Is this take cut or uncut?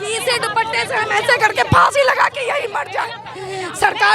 uncut